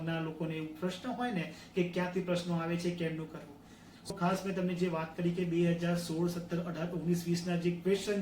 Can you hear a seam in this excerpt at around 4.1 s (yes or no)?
yes